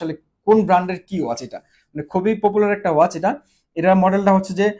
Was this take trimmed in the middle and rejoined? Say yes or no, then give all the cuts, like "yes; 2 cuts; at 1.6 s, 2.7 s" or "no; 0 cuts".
no; 0 cuts